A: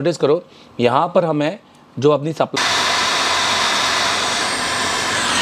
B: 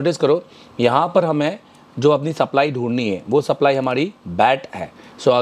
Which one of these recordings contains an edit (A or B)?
A